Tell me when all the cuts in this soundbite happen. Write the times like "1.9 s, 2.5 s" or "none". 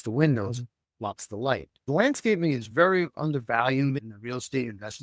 1.8 s

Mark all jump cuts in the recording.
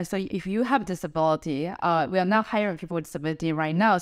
none

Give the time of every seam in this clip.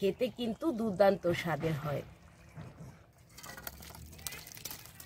2.3 s

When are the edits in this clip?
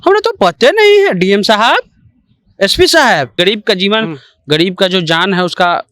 3.3 s

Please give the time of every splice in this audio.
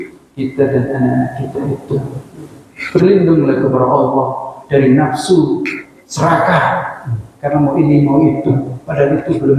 none

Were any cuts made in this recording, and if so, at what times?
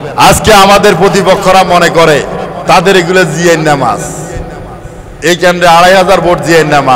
2.5 s

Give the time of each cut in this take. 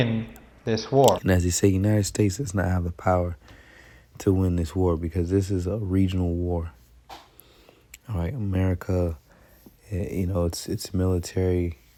none

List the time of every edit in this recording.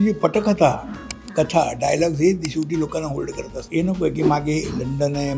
3.6 s

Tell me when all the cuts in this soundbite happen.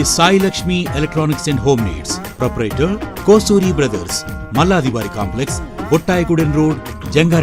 none

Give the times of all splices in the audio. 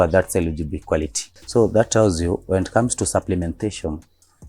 1.3 s

